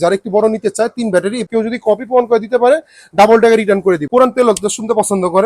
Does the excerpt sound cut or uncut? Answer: cut